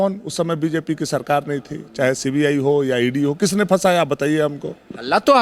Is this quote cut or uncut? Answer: uncut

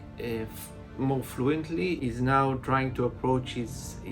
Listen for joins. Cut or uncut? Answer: cut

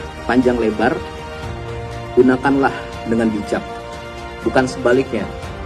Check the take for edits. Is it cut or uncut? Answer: uncut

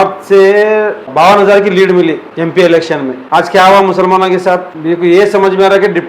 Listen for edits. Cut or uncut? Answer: cut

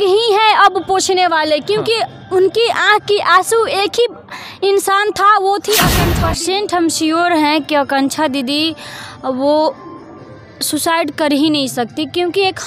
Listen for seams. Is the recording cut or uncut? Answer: cut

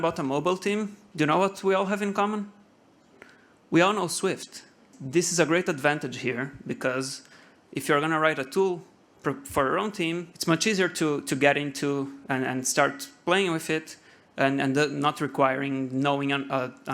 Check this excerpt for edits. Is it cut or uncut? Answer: cut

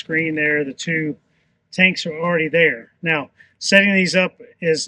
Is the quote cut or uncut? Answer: uncut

